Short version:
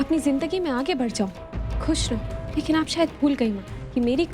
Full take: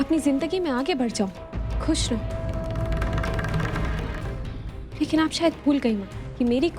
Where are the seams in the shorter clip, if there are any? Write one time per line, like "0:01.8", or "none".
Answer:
0:02.4